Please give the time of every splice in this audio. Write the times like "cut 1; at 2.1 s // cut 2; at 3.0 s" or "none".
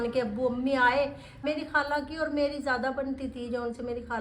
cut 1; at 1.4 s